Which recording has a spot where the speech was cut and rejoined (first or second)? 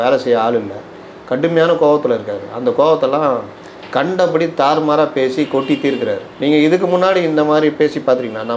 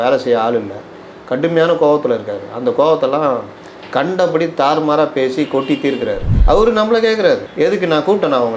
second